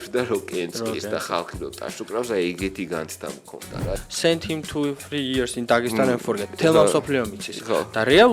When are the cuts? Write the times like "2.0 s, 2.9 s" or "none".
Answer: 3.9 s

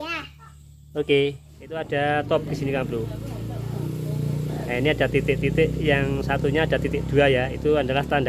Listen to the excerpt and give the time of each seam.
1.8 s

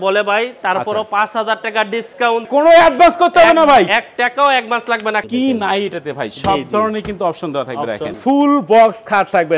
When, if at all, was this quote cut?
2.5 s, 5.2 s, 8.2 s

